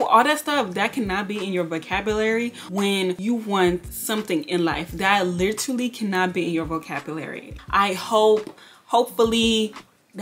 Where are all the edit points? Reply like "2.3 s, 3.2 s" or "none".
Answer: none